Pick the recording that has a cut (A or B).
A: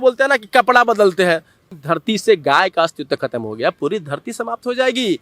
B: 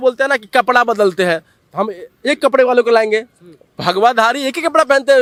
A